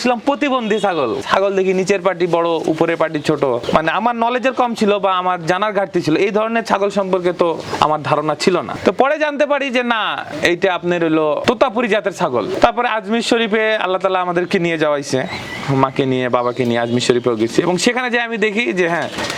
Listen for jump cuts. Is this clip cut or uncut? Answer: uncut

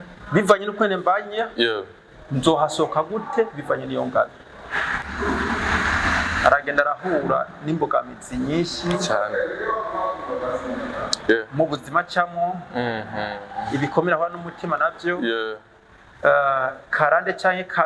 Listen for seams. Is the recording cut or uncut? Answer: cut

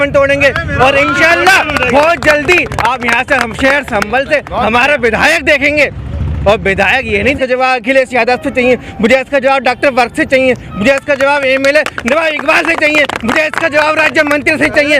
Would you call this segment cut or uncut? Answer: cut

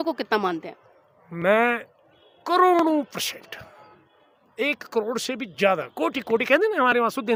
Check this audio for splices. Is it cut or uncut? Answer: uncut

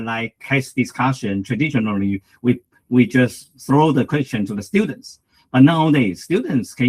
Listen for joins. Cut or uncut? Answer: uncut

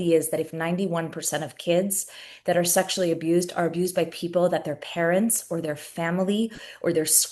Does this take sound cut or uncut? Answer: uncut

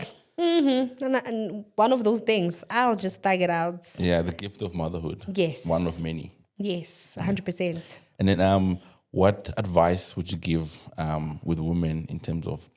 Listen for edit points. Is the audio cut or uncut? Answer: uncut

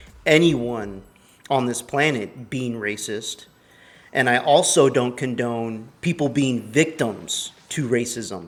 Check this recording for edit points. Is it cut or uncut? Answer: uncut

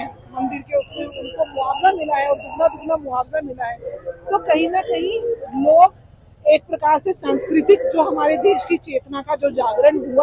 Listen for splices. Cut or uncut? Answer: uncut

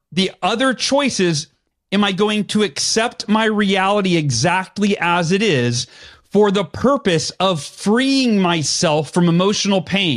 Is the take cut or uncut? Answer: uncut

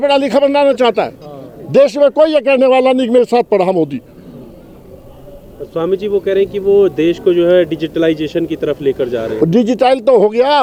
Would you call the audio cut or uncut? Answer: uncut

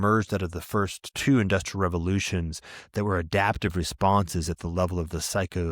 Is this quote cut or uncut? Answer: cut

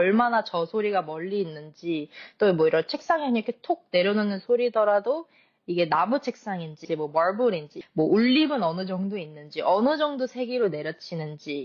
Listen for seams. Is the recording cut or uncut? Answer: cut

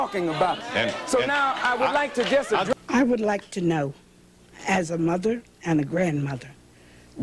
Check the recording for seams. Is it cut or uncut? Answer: cut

